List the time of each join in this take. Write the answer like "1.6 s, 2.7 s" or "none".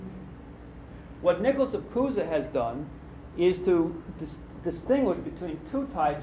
2.5 s